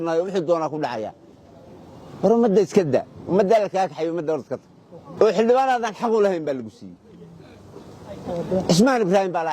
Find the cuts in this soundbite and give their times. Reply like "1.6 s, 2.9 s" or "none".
5.1 s